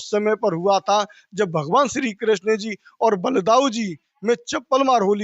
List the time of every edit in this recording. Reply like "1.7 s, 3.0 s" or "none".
none

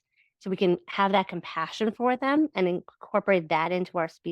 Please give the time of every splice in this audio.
none

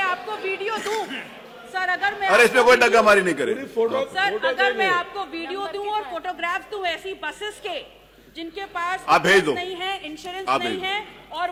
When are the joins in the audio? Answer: none

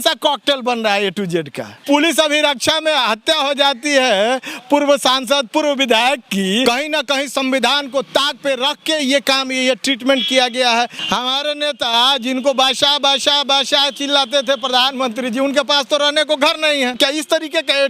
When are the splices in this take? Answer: 1.8 s, 6.6 s, 11.0 s, 17.0 s

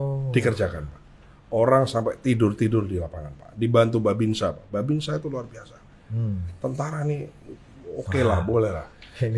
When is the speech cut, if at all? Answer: none

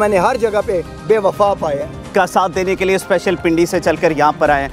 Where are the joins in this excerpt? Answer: 2.1 s

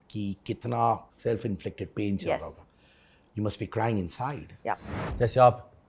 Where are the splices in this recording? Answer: 4.9 s

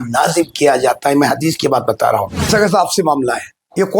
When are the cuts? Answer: 2.5 s

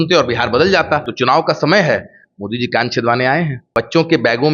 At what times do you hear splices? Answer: 1.1 s, 3.6 s

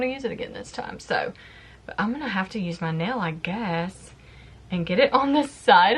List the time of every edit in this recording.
none

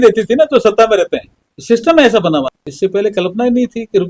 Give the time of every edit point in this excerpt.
2.5 s

